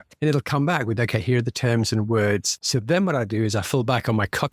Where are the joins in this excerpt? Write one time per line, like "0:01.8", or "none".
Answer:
0:02.5